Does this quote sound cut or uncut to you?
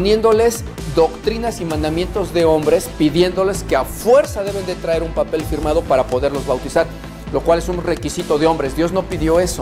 uncut